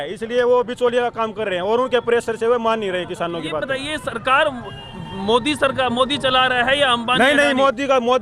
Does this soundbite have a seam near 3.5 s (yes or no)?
no